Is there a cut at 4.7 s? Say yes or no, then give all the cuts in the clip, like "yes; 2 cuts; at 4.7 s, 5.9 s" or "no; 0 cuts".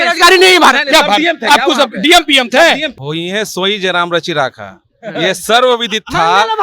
no; 1 cut; at 2.9 s